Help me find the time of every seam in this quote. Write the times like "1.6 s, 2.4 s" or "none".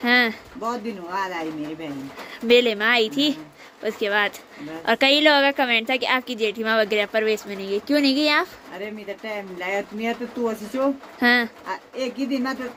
none